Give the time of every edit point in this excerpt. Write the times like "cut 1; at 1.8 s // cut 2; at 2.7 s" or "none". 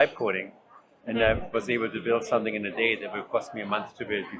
none